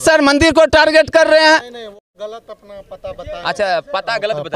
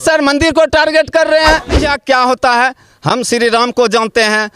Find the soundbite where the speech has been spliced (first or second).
second